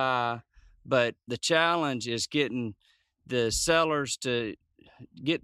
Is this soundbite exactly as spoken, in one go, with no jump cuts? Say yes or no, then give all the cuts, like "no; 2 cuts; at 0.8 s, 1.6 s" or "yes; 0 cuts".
no; 1 cut; at 1.3 s